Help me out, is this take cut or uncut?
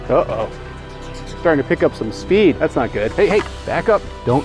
uncut